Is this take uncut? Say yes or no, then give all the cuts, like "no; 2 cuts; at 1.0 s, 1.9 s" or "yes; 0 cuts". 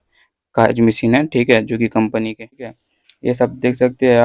no; 1 cut; at 2.7 s